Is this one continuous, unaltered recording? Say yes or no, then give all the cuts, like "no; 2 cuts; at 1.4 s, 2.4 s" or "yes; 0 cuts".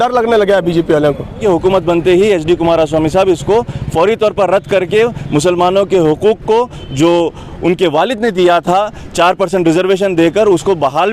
no; 1 cut; at 1.4 s